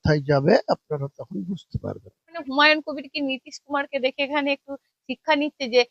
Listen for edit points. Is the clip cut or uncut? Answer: cut